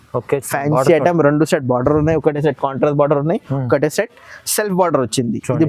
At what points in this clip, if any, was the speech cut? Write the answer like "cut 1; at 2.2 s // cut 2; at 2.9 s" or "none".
none